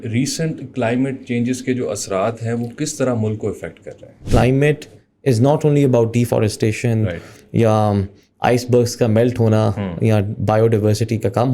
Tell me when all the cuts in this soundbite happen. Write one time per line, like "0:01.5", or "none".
0:04.2